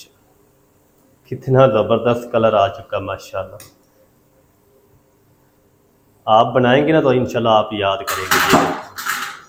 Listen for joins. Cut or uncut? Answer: uncut